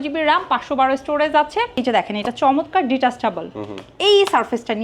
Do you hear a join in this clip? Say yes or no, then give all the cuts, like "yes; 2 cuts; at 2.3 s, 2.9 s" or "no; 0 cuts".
yes; 1 cut; at 1.8 s